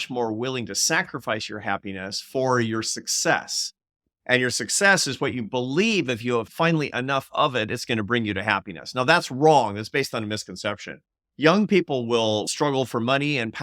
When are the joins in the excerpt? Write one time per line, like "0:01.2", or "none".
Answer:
0:06.5
0:12.5